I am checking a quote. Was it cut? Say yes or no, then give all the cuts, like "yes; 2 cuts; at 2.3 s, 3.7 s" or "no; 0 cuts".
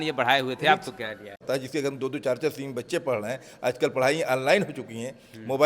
yes; 1 cut; at 1.4 s